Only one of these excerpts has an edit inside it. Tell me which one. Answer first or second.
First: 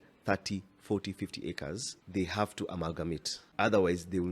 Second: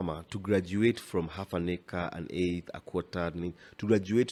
first